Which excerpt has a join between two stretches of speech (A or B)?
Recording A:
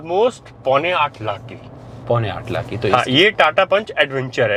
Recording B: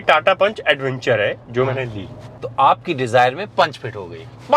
B